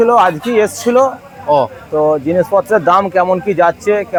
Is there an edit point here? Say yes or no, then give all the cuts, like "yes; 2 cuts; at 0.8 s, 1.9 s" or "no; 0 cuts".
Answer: no; 0 cuts